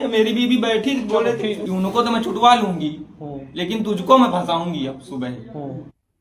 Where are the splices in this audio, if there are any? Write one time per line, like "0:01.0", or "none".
0:01.6